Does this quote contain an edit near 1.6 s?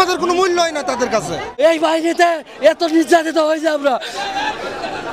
yes; 1 cut; at 1.6 s

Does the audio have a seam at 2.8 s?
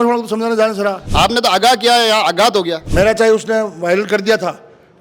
yes; 2 cuts; at 1.0 s, 2.8 s

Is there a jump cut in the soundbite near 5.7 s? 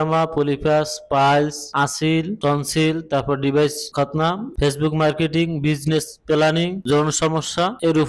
no; 0 cuts

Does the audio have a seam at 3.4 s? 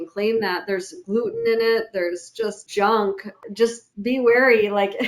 yes; 2 cuts; at 2.6 s, 3.4 s

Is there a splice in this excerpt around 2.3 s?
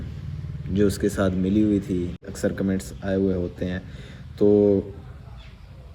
yes; 1 cut; at 2.3 s

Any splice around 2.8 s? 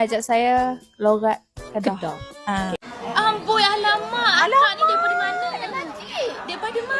yes; 1 cut; at 2.8 s

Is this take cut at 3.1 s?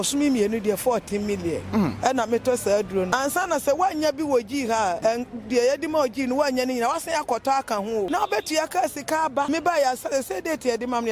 yes; 4 cuts; at 3.1 s, 5.0 s, 8.1 s, 9.5 s

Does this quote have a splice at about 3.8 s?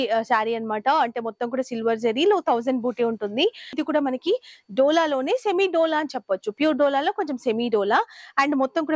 yes; 1 cut; at 3.8 s

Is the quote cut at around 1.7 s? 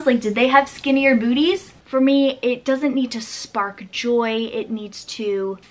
yes; 1 cut; at 1.7 s

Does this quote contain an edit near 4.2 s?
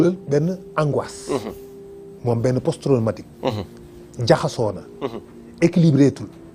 no; 0 cuts

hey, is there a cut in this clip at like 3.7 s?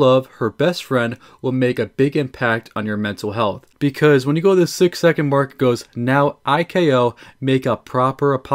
yes; 1 cut; at 3.7 s

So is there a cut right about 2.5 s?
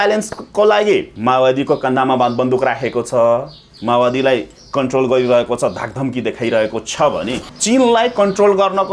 no; 2 cuts; at 1.1 s, 7.4 s

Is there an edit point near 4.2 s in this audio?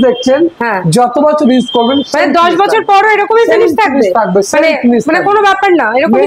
no; 0 cuts

